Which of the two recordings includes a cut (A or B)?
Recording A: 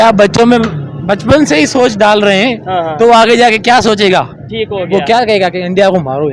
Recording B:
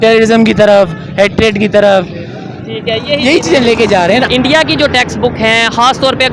B